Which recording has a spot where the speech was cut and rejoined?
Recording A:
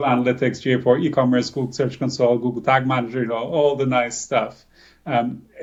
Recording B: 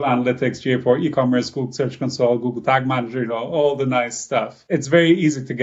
B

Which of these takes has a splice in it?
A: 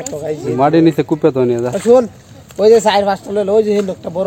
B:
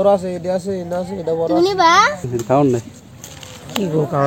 B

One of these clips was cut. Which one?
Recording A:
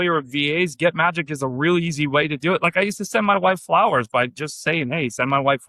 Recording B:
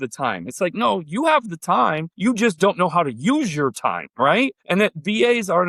B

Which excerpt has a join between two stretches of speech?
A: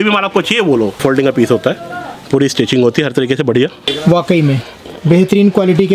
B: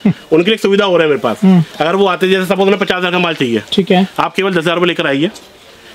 A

